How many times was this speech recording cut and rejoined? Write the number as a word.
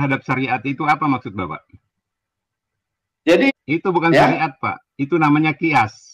one